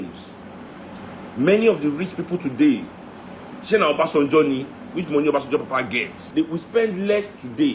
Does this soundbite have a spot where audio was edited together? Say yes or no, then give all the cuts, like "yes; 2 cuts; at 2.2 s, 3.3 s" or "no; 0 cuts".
yes; 1 cut; at 6.2 s